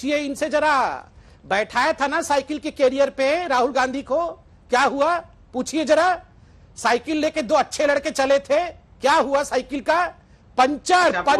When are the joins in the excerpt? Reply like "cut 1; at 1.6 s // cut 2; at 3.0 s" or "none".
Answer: none